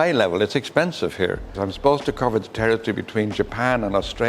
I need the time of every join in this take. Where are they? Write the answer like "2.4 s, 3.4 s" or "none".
1.6 s